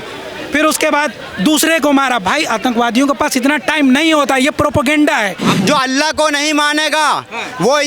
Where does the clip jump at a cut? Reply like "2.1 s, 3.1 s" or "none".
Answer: 5.5 s